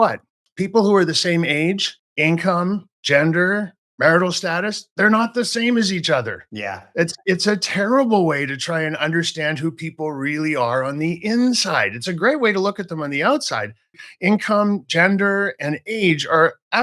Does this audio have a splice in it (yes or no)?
yes